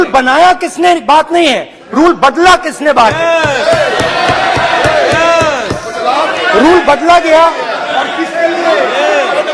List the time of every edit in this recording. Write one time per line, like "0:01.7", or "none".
none